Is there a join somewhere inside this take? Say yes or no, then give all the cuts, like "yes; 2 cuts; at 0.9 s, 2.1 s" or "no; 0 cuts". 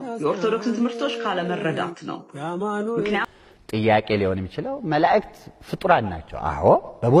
yes; 1 cut; at 3.3 s